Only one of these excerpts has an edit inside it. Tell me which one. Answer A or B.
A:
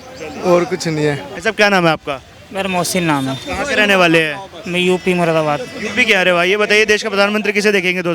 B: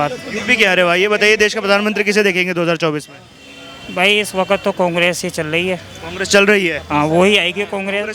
A